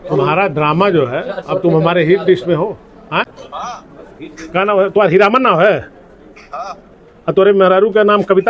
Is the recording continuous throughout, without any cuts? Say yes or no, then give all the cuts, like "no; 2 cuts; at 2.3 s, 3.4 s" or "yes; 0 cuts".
yes; 0 cuts